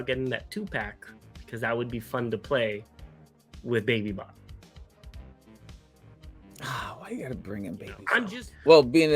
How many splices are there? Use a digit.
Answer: 1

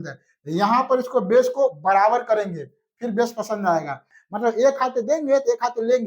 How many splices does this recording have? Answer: 1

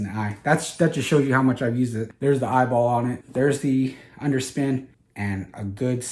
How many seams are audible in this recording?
3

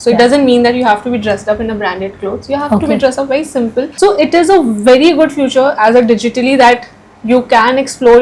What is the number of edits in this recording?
1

